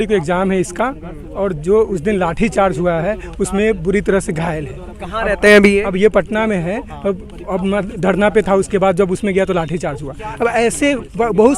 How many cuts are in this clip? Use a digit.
0